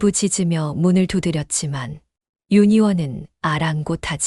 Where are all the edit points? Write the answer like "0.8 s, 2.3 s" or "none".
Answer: none